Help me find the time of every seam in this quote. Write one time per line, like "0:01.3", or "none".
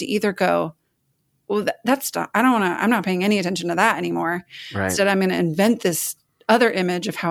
0:04.8